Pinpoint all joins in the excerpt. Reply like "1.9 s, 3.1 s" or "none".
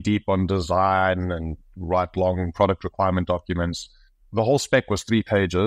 4.3 s